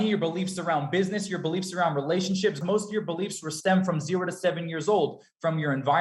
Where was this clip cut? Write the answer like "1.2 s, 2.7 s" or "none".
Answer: 2.6 s